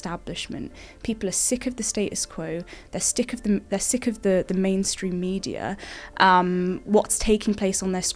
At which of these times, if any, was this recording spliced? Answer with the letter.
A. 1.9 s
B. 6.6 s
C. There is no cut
C